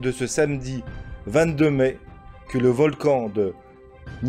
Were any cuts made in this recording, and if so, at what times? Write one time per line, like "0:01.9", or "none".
none